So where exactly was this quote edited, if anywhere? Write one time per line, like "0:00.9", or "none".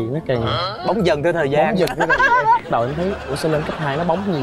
none

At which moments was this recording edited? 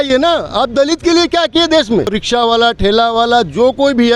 0:02.2

